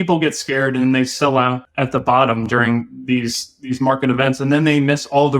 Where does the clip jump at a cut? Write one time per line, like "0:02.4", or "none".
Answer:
0:01.7